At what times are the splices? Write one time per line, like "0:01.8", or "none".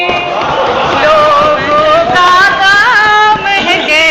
none